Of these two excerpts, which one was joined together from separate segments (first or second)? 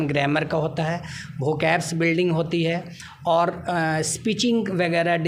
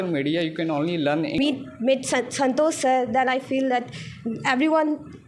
second